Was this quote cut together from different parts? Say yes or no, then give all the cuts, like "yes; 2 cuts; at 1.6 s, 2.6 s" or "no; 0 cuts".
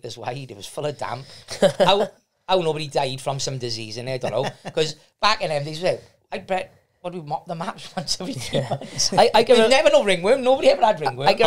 no; 0 cuts